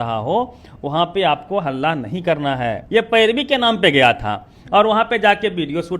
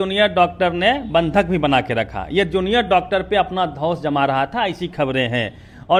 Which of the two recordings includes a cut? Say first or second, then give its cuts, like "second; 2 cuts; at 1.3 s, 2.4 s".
first; 1 cut; at 2.8 s